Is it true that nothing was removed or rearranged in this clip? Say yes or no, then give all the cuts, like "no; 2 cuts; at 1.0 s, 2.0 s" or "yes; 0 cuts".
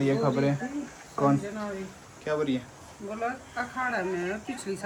yes; 0 cuts